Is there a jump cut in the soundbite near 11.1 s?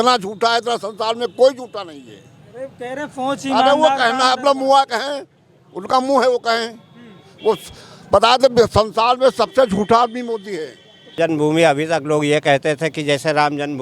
yes; 1 cut; at 11.1 s

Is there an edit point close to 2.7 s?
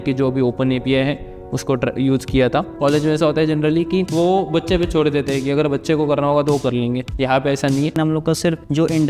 yes; 2 cuts; at 2.7 s, 8.0 s

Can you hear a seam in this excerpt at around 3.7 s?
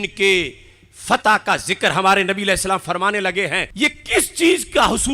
yes; 1 cut; at 3.7 s

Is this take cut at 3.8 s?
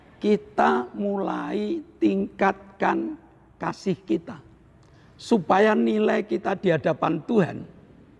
no; 0 cuts

